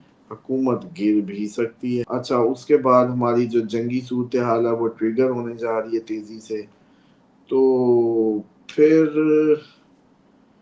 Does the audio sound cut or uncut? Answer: cut